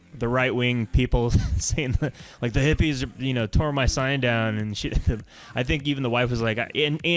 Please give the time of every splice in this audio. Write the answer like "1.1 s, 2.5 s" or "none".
none